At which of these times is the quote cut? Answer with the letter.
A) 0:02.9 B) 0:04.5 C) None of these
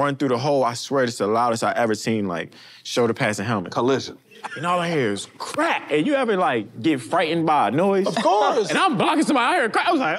B